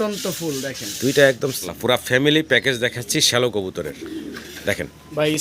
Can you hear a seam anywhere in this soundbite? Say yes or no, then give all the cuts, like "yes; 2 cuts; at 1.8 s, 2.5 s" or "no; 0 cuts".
yes; 1 cut; at 1.6 s